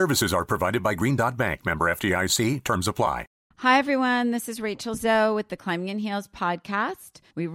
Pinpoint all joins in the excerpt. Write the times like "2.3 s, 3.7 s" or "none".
3.3 s